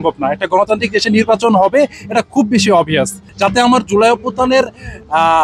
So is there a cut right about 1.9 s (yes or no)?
no